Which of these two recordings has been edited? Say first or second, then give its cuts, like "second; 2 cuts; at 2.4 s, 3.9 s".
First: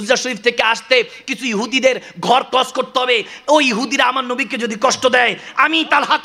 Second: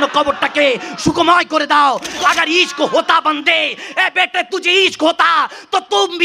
second; 1 cut; at 2.1 s